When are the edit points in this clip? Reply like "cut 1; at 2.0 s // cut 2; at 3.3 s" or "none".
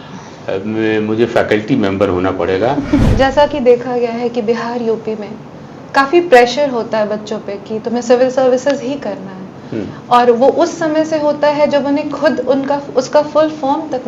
cut 1; at 3.1 s